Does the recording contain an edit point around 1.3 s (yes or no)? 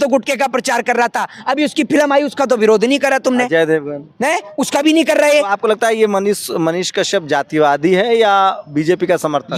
no